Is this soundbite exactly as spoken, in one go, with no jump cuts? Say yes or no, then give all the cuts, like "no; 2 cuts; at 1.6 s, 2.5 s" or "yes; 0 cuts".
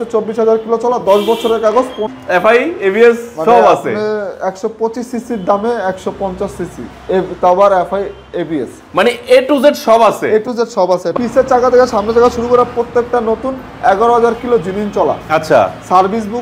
no; 2 cuts; at 2.0 s, 11.1 s